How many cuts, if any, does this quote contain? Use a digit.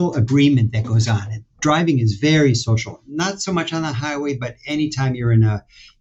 0